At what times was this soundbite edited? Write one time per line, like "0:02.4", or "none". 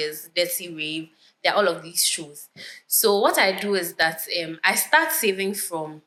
none

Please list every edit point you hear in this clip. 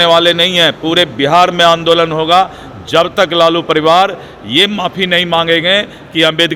none

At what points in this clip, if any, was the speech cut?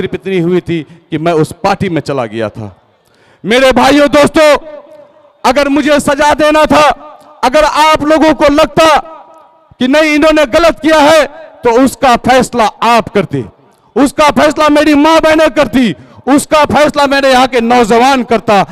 none

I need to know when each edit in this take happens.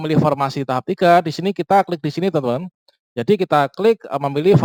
none

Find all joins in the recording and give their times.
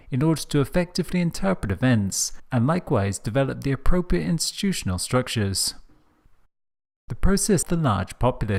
none

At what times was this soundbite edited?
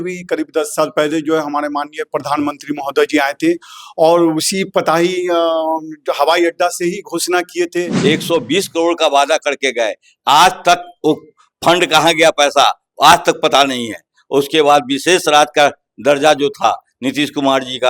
0:07.9

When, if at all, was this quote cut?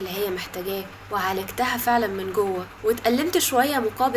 0:00.9
0:02.7

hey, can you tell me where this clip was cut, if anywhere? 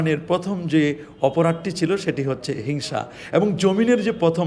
none

